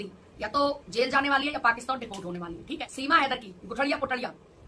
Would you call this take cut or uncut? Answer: cut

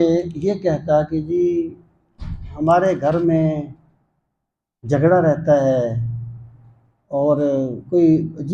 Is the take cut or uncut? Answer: uncut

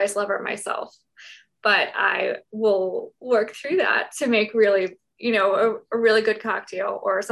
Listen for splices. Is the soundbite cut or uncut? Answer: uncut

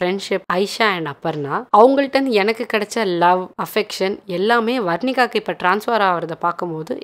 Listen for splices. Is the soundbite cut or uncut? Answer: uncut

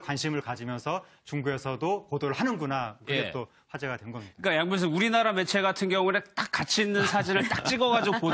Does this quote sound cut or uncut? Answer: cut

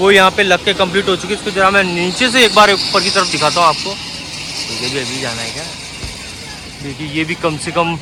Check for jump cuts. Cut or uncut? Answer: uncut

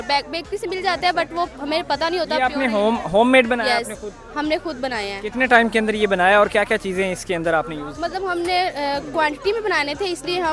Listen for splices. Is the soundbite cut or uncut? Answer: uncut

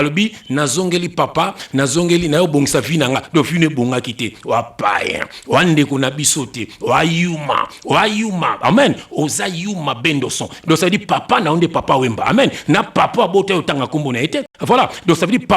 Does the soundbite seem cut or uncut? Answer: uncut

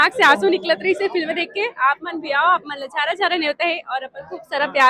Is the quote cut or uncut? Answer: uncut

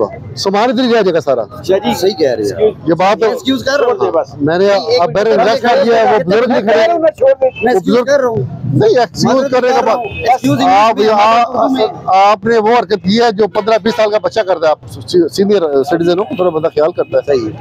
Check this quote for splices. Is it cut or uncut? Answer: uncut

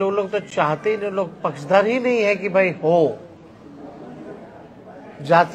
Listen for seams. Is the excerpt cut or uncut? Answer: uncut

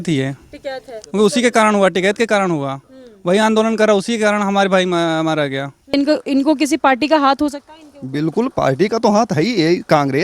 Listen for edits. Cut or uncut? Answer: cut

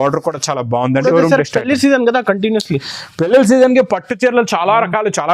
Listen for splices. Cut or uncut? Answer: cut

